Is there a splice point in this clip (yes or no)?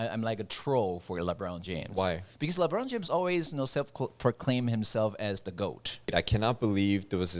yes